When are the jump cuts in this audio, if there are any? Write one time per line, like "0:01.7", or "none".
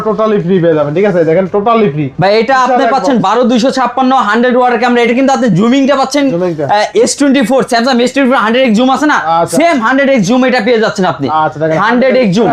none